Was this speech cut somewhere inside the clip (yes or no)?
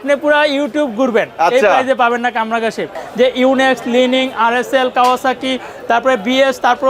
yes